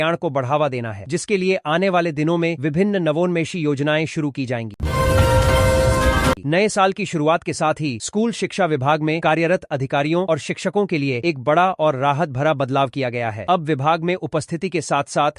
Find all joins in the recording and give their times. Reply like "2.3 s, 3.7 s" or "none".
4.8 s, 6.4 s